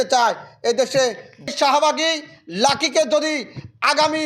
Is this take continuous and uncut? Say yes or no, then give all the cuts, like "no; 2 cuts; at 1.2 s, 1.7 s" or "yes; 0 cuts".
no; 1 cut; at 1.5 s